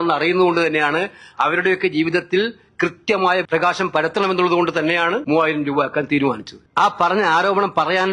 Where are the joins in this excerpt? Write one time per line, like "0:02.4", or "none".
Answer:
0:03.4
0:05.2
0:06.5